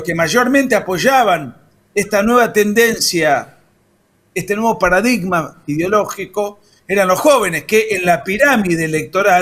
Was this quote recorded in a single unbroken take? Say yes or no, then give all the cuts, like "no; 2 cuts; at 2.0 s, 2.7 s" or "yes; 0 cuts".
yes; 0 cuts